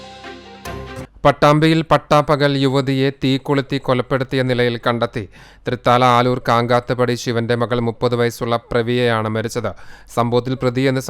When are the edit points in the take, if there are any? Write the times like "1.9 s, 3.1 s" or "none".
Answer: 1.0 s